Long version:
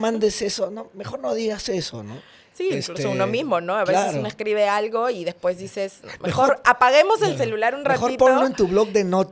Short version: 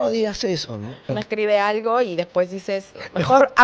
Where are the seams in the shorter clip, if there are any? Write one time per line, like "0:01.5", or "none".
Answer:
0:01.2